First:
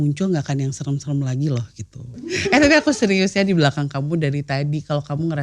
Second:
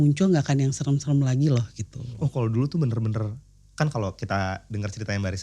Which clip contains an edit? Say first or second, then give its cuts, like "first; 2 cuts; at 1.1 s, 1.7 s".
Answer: first; 1 cut; at 2.5 s